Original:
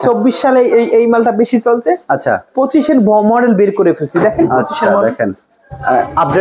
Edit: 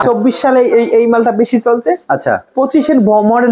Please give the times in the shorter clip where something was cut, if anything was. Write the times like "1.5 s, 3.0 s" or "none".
none